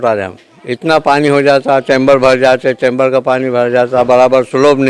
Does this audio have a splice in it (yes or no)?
no